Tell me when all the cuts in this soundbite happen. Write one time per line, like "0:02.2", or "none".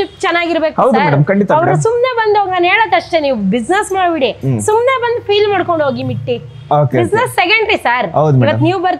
none